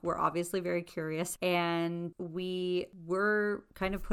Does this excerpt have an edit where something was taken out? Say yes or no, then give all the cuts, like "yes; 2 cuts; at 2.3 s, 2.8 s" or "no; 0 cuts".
yes; 3 cuts; at 1.3 s, 2.2 s, 3.0 s